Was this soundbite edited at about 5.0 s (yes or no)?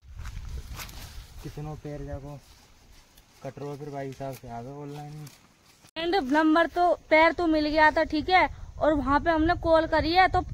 no